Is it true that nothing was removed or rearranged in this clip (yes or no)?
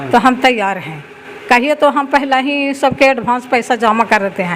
yes